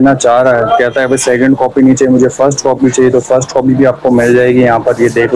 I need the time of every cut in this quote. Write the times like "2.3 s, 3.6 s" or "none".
none